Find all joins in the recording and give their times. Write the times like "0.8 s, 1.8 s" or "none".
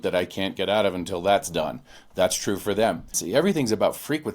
3.2 s